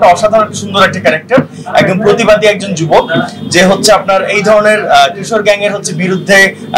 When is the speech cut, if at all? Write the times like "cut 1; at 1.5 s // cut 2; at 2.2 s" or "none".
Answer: none